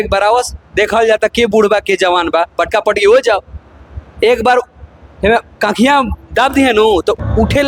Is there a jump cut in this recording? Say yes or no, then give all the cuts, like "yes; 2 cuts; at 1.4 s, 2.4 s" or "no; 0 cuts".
no; 0 cuts